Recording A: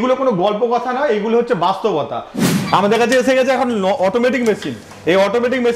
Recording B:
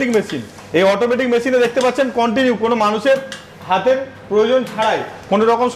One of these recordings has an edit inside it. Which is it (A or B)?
A